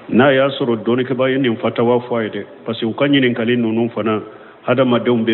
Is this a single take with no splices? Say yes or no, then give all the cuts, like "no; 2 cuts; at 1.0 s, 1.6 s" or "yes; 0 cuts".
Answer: no; 1 cut; at 1.1 s